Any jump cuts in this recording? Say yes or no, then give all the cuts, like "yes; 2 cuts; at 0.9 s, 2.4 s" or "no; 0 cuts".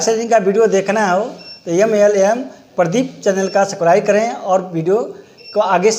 no; 0 cuts